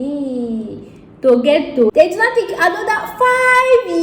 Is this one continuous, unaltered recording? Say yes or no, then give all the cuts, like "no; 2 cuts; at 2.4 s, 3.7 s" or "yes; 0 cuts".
no; 1 cut; at 1.9 s